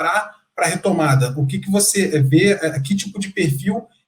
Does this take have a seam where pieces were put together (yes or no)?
no